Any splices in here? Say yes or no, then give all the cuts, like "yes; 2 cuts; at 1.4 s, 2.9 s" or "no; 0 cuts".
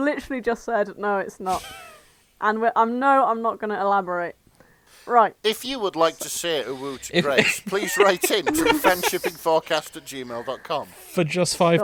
no; 0 cuts